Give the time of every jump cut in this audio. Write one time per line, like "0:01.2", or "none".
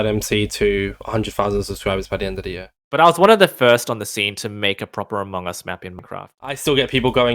0:02.7
0:06.4